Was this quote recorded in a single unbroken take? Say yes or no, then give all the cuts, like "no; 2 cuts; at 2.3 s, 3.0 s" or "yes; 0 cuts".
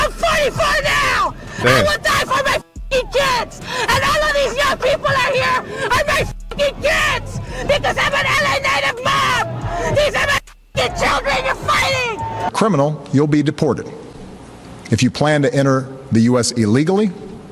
no; 1 cut; at 12.5 s